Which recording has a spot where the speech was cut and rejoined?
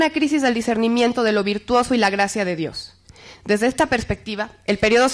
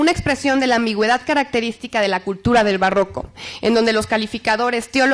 second; 1 cut; at 1.8 s

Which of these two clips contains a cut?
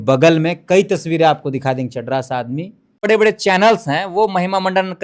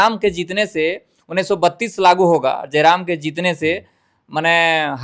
first; 1 cut; at 3.0 s

